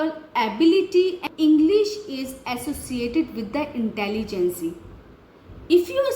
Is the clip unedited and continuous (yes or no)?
no